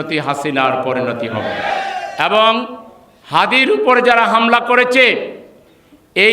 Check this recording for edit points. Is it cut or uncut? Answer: cut